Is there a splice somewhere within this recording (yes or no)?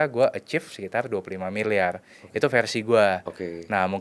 no